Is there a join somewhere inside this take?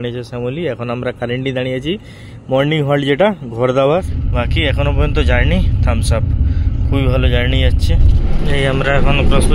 yes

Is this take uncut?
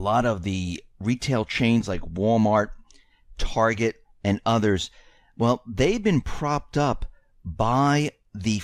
no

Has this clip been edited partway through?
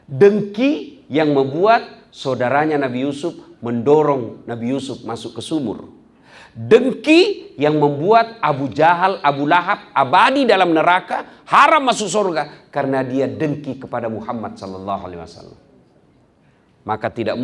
no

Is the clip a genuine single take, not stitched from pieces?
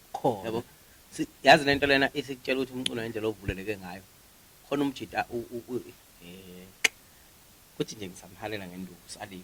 yes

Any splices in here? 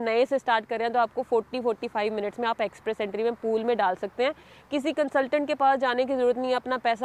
no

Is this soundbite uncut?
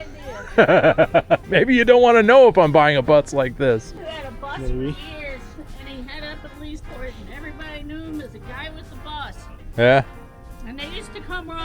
no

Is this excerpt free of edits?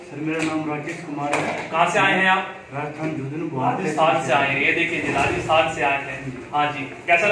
yes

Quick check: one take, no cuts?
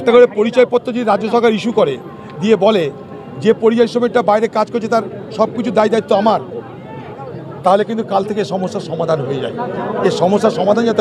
yes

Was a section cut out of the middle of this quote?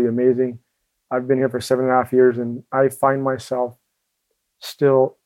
yes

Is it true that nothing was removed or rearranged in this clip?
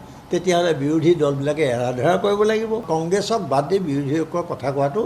no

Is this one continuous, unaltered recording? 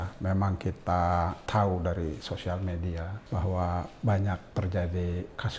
no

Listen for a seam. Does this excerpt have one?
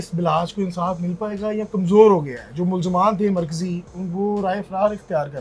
no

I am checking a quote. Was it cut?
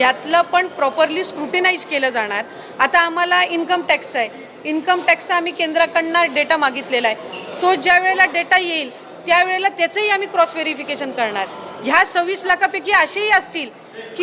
no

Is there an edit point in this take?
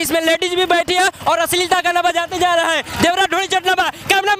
no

